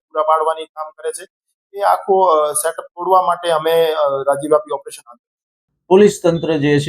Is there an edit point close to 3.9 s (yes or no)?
no